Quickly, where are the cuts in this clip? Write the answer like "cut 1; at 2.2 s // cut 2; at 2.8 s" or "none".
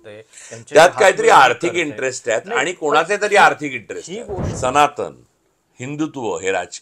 cut 1; at 4.4 s